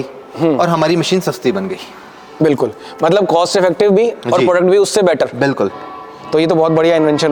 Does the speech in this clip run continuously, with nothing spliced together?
yes; 0 cuts

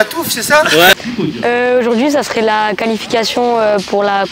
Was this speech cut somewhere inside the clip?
yes; 1 cut; at 0.9 s

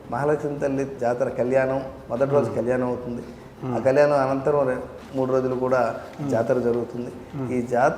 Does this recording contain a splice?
yes; 2 cuts; at 0.9 s, 5.0 s

